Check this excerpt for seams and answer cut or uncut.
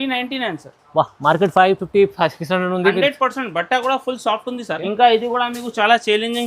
cut